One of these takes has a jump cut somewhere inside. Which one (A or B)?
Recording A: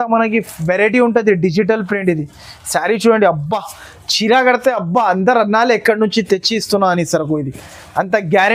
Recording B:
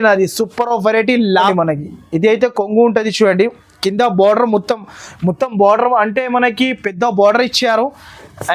B